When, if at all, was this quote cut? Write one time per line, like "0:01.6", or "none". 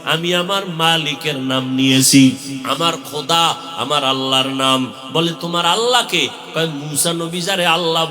0:02.6